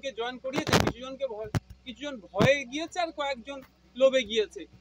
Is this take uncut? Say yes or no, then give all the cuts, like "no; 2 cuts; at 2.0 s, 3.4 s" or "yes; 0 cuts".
yes; 0 cuts